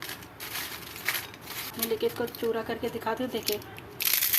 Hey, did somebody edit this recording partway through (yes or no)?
yes